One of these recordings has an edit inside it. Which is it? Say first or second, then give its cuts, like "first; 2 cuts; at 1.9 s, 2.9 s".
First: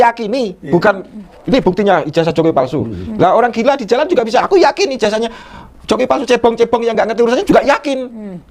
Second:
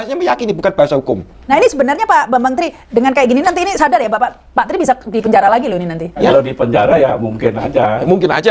second; 2 cuts; at 1.3 s, 6.2 s